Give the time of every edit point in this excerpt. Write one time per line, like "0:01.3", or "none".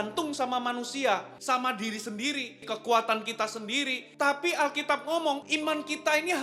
0:01.3
0:02.6
0:04.0
0:05.4